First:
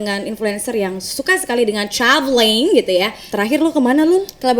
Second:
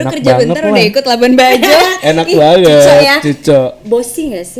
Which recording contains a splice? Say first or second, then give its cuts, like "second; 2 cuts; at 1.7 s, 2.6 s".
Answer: first; 1 cut; at 3.3 s